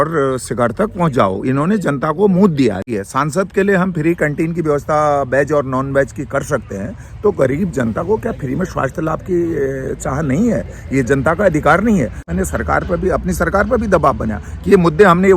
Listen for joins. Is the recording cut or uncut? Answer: cut